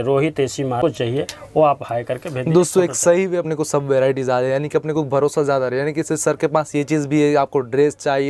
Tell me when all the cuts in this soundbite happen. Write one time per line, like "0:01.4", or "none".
0:00.8
0:03.4